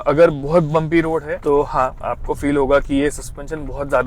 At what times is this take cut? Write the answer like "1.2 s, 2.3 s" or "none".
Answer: 1.3 s, 2.0 s